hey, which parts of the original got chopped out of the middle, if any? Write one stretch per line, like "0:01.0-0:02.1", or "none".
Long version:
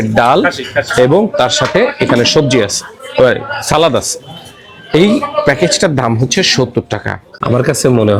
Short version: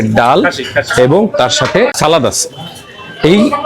0:01.9-0:03.6